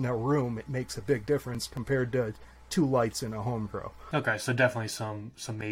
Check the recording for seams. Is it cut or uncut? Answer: uncut